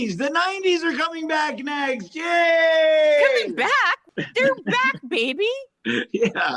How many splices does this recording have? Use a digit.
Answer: 1